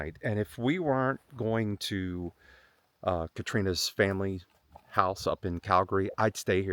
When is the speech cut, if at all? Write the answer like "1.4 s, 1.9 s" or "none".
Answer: none